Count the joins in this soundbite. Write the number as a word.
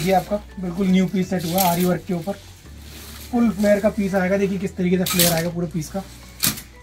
zero